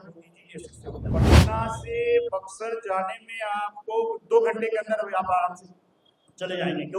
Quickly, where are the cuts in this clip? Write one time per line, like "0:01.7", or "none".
0:01.2